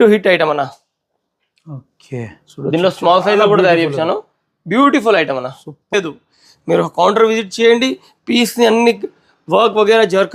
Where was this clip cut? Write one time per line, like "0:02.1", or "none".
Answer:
0:05.9